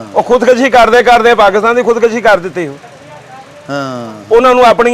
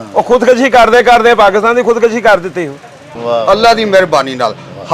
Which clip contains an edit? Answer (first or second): second